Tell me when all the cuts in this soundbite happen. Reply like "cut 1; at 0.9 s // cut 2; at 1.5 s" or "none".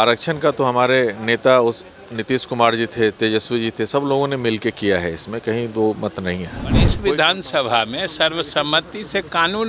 cut 1; at 7.0 s